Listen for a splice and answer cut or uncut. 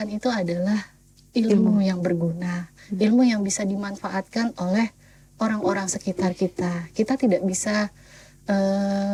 uncut